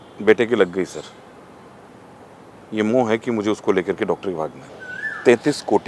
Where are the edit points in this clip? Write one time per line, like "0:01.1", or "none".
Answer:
0:04.6